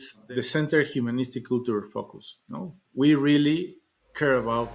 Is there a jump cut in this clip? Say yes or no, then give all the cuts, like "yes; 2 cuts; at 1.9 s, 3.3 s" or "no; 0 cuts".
no; 0 cuts